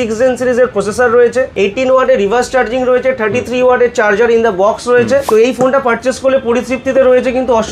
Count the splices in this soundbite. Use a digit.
2